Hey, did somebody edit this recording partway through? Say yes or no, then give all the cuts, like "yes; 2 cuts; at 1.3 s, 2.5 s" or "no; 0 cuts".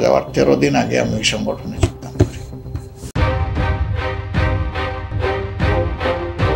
no; 0 cuts